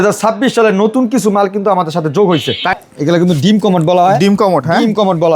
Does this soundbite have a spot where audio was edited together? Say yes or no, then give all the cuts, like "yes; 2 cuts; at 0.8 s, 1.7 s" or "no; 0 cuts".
yes; 1 cut; at 2.8 s